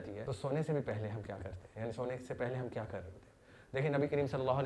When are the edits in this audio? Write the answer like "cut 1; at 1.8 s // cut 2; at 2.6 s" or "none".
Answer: none